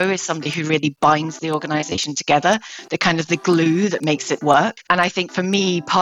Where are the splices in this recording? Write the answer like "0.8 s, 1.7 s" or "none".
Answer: 4.8 s